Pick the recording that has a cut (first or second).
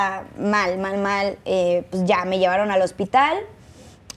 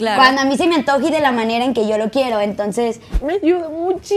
second